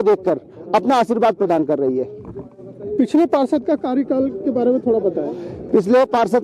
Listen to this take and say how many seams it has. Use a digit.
0